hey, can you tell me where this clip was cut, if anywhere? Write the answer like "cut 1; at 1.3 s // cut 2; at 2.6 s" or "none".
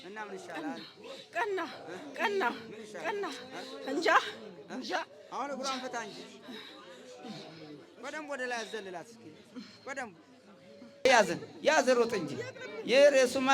cut 1; at 11.1 s